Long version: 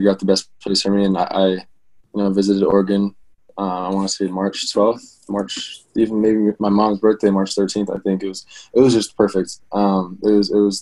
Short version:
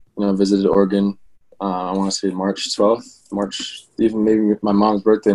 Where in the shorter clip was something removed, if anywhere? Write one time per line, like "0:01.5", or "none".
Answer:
none